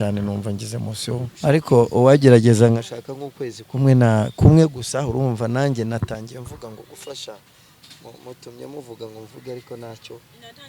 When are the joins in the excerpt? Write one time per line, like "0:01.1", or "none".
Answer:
0:01.3